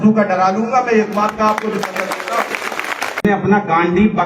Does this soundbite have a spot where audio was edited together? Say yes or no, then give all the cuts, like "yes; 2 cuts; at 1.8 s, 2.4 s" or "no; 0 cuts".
yes; 1 cut; at 3.2 s